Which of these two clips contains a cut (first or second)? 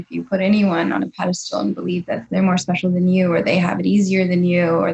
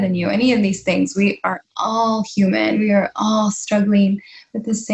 first